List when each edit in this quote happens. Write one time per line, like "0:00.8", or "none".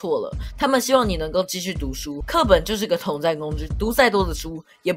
0:02.2
0:03.6